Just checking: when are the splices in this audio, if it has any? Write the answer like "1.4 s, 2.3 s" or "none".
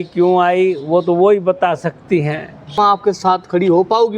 2.7 s